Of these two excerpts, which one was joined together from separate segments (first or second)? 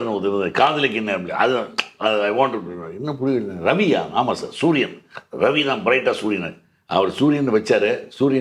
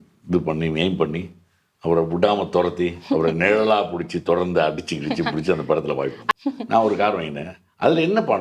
second